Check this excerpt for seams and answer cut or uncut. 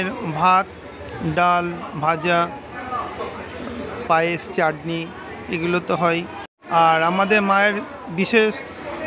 uncut